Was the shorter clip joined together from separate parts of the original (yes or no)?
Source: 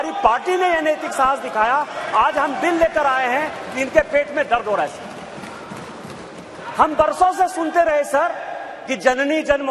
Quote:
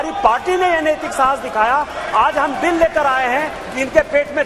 no